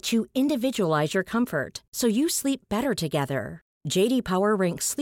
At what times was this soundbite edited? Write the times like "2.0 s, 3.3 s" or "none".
none